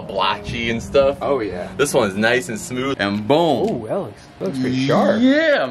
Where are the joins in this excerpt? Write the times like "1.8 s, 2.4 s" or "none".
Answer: 2.9 s